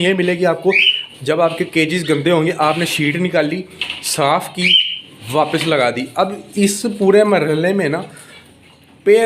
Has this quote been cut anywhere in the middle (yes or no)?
no